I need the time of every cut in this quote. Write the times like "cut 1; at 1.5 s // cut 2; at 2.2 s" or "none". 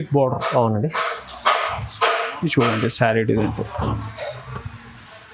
none